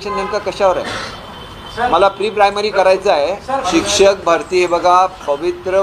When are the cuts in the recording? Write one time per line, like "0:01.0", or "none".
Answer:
0:03.7